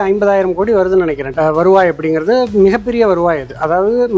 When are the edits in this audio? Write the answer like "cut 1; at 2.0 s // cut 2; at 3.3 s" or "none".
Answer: cut 1; at 1.2 s